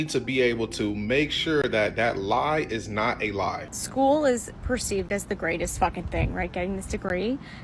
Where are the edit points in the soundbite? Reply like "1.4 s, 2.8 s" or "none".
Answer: 3.6 s